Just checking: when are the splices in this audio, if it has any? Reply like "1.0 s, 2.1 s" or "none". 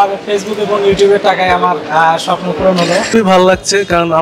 3.1 s